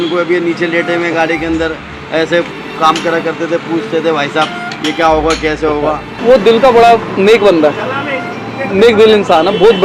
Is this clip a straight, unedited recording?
no; 1 cut; at 6.1 s

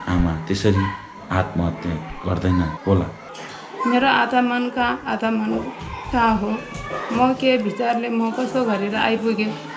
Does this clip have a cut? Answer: yes; 1 cut; at 3.2 s

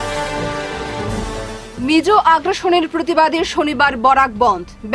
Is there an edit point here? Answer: no; 0 cuts

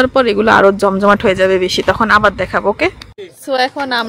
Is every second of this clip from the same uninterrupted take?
yes; 0 cuts

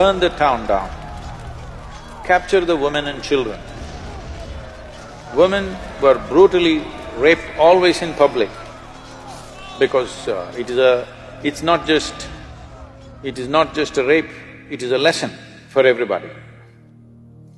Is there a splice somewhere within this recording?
no; 0 cuts

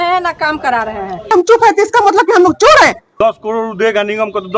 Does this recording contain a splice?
yes; 2 cuts; at 1.3 s, 3.0 s

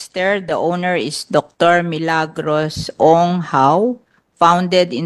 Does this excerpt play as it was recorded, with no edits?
yes; 0 cuts

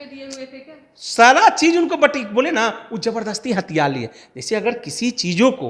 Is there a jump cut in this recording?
no; 0 cuts

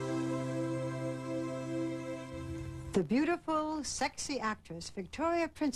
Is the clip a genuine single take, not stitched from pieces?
yes; 0 cuts

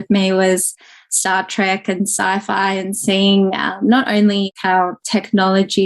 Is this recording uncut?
no; 1 cut; at 4.5 s

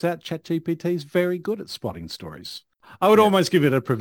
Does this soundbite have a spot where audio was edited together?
yes; 1 cut; at 2.8 s

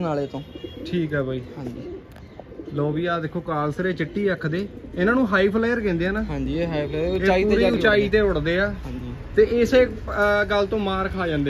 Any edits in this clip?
no; 0 cuts

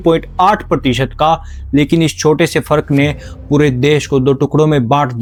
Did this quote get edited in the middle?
no; 0 cuts

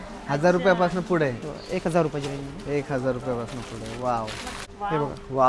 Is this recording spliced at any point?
yes; 1 cut; at 4.5 s

